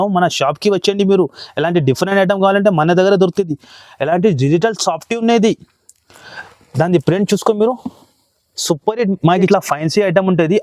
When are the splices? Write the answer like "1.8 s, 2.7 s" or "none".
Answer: 9.5 s